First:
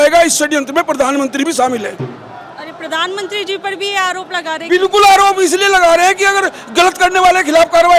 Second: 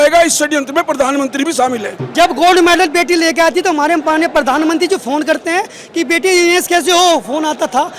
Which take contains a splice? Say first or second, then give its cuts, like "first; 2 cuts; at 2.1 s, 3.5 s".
second; 1 cut; at 2.0 s